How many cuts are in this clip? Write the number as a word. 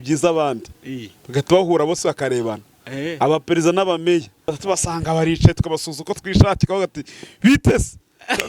one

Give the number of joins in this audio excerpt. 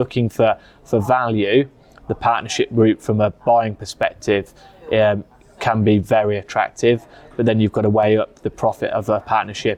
zero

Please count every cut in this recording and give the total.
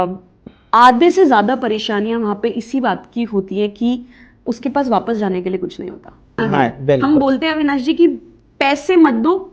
one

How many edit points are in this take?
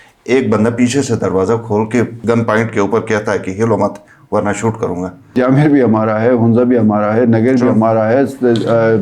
two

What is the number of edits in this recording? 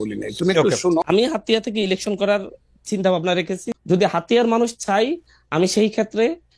two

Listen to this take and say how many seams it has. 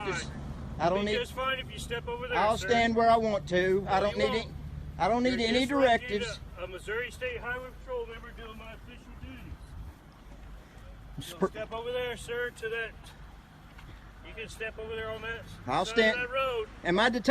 one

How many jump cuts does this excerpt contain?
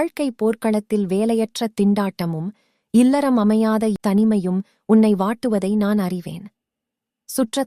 one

